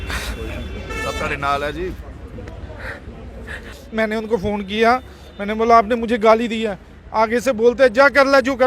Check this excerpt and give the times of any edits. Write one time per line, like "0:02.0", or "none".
0:03.7